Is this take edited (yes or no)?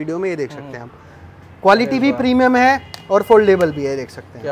no